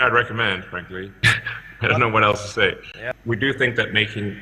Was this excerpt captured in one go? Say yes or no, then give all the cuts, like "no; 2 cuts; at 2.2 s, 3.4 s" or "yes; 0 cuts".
no; 1 cut; at 3.0 s